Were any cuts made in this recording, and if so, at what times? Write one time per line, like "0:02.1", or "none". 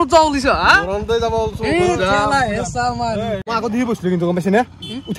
0:03.5